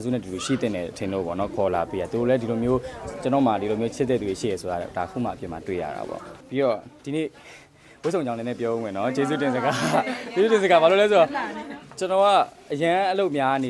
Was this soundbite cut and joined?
no; 0 cuts

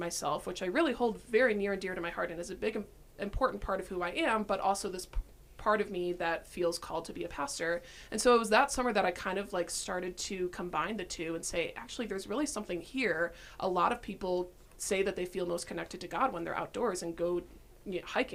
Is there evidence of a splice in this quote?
no; 0 cuts

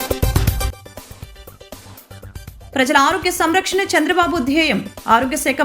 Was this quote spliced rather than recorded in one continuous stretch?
yes; 1 cut; at 2.7 s

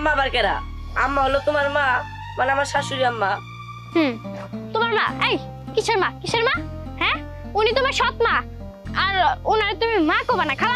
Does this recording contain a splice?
no; 0 cuts

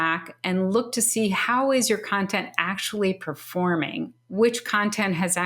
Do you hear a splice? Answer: yes; 1 cut; at 4.2 s

